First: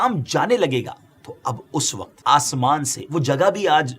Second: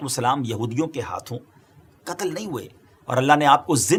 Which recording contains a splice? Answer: first; 1 cut; at 2.2 s

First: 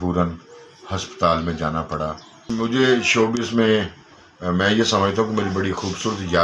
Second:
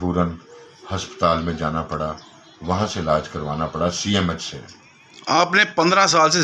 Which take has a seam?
first; 1 cut; at 2.5 s

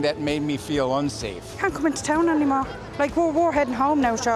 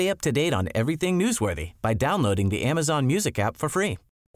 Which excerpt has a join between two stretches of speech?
first; 1 cut; at 1.4 s

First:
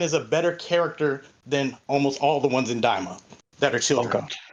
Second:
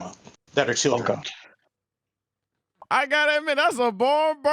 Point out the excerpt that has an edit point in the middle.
second; 1 cut; at 2.8 s

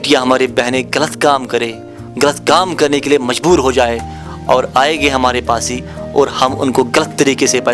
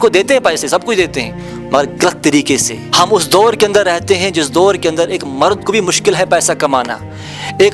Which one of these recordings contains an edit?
second; 1 cut; at 2.8 s

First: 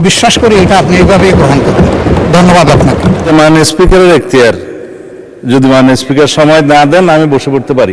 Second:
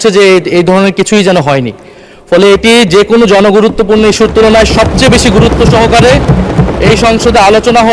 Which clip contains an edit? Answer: first; 1 cut; at 3.2 s

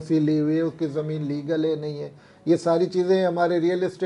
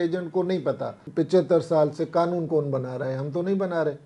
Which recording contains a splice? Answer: second; 1 cut; at 1.0 s

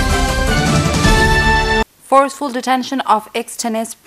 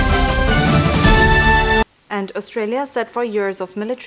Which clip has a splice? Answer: first; 1 cut; at 1.5 s

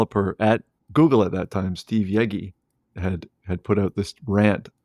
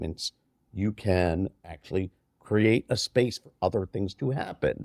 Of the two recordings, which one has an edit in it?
first; 1 cut; at 3.0 s

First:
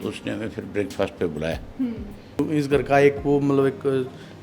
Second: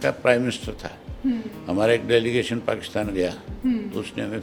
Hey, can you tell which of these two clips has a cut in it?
first; 1 cut; at 2.4 s

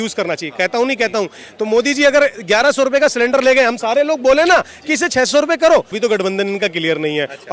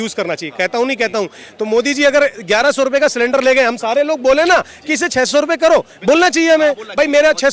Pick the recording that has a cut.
first; 1 cut; at 5.9 s

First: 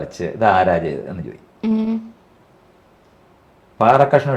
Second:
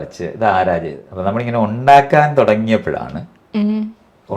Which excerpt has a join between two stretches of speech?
second; 1 cut; at 1.0 s

